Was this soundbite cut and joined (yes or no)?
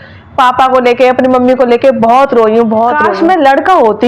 yes